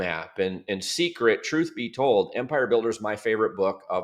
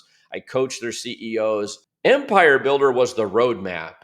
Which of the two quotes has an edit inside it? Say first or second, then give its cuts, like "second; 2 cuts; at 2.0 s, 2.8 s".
second; 1 cut; at 1.8 s